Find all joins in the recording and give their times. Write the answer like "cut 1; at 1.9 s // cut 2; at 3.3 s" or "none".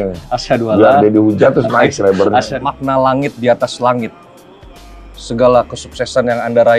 cut 1; at 2.5 s